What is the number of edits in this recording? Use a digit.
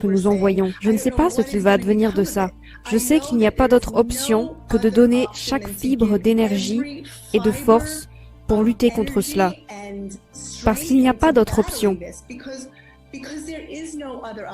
1